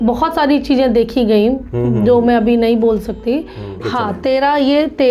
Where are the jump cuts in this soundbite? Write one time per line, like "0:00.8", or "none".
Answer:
0:03.8